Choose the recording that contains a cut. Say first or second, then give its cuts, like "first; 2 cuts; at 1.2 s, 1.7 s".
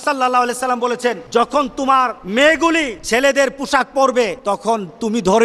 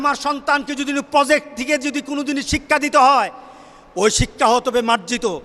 first; 4 cuts; at 1.2 s, 2.2 s, 3.0 s, 4.4 s